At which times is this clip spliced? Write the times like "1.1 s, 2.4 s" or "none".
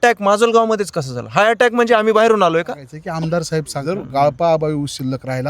2.9 s, 3.8 s